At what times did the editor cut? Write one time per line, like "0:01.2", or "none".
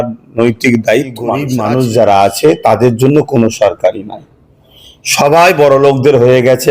0:01.5

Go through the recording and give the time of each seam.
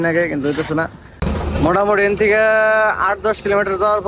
0:01.1

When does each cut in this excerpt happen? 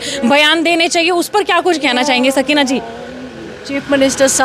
none

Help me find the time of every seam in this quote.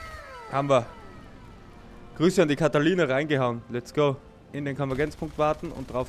0:04.4

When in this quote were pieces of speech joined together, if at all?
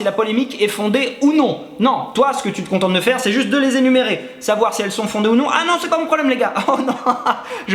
none

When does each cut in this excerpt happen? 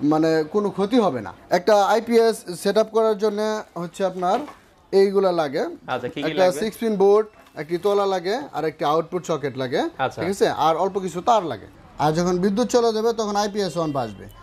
0:01.3
0:11.8

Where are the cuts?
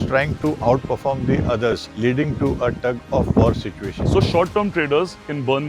0:04.1

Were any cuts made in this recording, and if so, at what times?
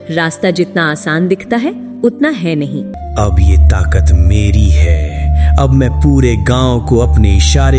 0:03.0

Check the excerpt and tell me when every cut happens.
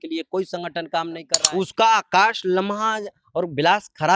0:01.2

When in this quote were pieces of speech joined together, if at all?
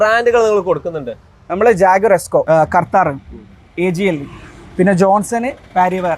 0:02.4

